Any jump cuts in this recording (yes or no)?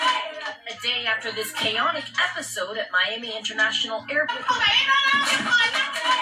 yes